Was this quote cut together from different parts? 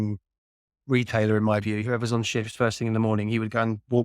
yes; 1 cut; at 1.8 s

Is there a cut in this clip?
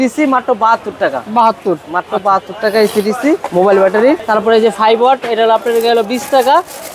no; 0 cuts

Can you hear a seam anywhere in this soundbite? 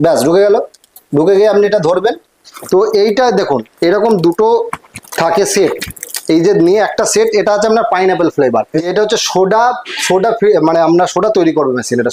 yes; 2 cuts; at 2.5 s, 8.9 s

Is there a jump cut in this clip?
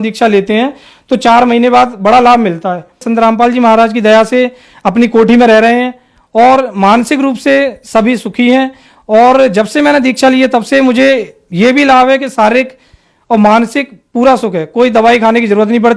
yes; 1 cut; at 3.0 s

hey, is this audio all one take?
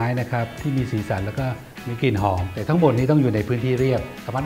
yes; 0 cuts

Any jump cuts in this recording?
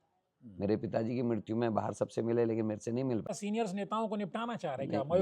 yes; 1 cut; at 3.3 s

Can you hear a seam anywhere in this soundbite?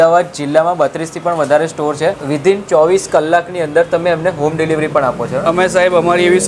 yes; 1 cut; at 2.2 s

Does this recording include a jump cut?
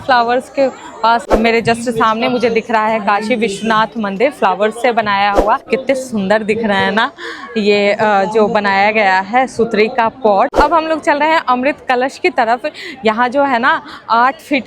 yes; 3 cuts; at 1.3 s, 5.7 s, 10.6 s

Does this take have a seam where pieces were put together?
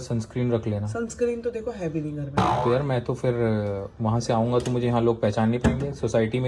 no; 0 cuts

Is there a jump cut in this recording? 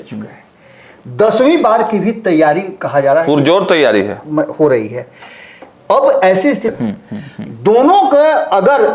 yes; 1 cut; at 6.7 s

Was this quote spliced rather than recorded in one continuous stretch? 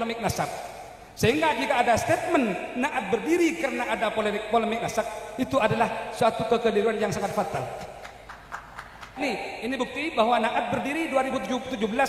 yes; 1 cut; at 9.2 s

